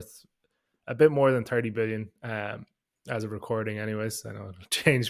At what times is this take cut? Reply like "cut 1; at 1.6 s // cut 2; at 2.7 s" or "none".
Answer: none